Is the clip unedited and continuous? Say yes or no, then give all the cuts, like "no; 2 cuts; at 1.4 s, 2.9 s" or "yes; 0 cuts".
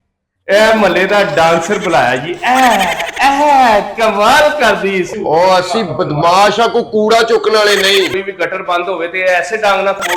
no; 2 cuts; at 5.1 s, 8.2 s